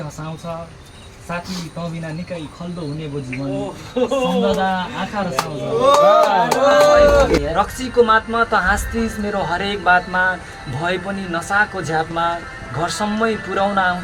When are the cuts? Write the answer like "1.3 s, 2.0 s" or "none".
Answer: 7.4 s